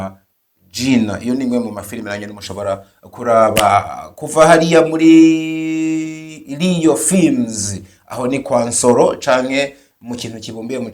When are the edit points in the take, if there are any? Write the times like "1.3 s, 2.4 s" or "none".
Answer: none